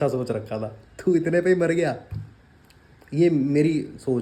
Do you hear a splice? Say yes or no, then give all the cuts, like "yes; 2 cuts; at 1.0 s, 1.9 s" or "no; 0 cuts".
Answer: no; 0 cuts